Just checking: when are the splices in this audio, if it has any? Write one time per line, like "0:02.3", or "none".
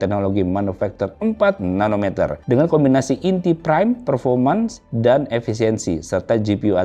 none